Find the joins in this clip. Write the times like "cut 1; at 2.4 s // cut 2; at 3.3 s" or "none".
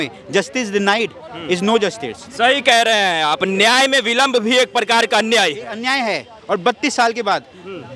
none